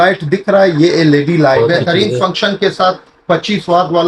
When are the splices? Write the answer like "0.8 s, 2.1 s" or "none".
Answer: 1.6 s